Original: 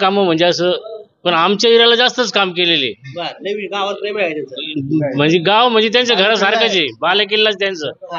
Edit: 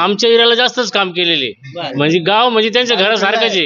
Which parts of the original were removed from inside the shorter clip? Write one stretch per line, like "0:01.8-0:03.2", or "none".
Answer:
0:03.3-0:05.1